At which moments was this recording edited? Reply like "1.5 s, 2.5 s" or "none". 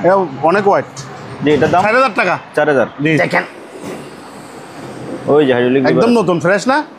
3.2 s